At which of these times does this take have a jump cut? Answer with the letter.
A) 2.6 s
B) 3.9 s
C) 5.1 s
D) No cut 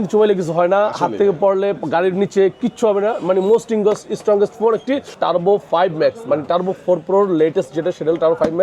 C